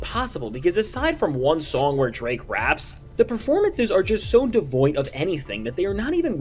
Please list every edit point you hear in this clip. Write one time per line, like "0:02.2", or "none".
none